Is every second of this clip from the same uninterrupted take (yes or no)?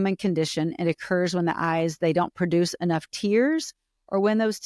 yes